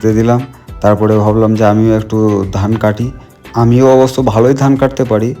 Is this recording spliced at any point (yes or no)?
no